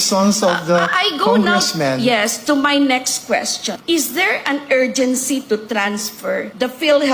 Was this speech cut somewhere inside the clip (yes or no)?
yes